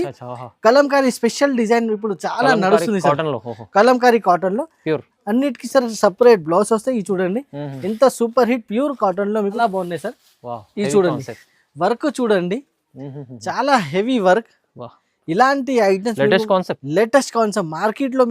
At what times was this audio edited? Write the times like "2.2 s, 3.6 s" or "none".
9.6 s